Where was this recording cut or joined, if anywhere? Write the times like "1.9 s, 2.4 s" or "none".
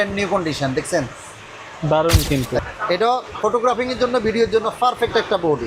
2.6 s